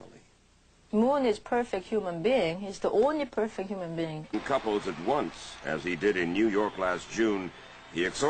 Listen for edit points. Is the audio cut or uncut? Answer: uncut